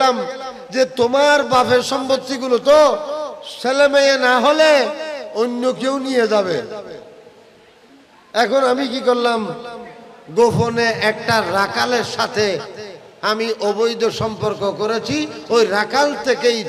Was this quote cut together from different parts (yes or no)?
no